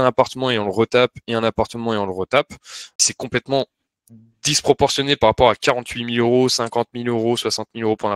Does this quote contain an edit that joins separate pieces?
yes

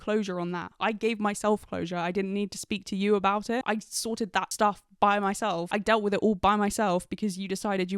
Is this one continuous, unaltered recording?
no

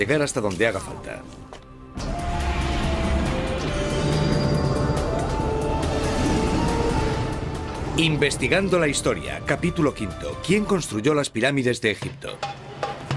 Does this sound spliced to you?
no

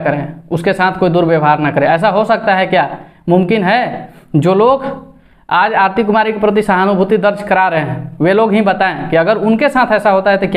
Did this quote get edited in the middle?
no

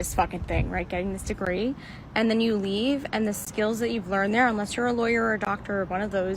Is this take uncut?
yes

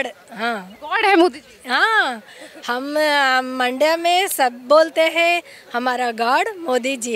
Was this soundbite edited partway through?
no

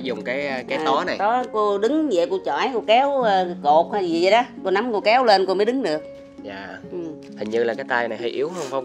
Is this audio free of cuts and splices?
no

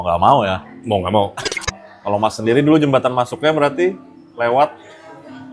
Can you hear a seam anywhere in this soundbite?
yes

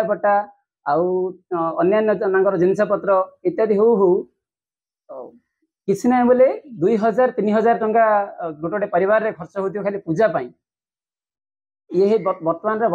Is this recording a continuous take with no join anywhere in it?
yes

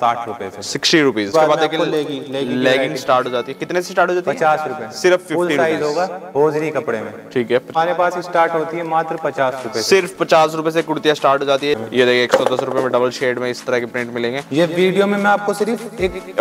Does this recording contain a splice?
yes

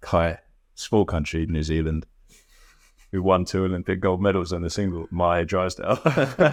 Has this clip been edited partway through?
no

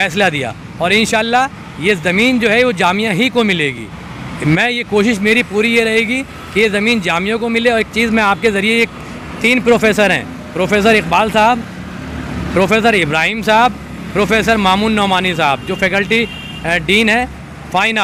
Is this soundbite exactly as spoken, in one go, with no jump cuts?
yes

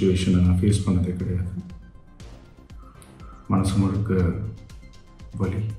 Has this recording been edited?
yes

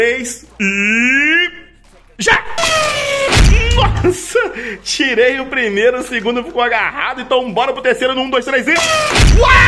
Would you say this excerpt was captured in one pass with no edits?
yes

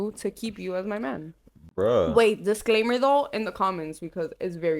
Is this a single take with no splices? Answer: yes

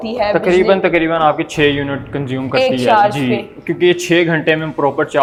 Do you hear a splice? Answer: no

